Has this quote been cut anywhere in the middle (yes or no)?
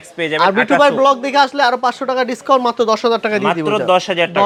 no